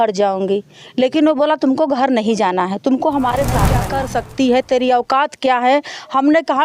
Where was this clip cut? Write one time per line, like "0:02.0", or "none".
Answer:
0:03.8